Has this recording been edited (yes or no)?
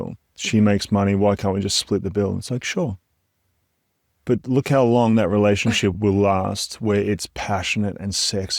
yes